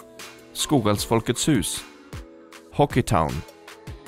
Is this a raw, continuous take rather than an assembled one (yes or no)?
yes